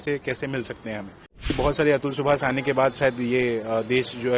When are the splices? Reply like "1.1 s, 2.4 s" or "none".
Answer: 1.5 s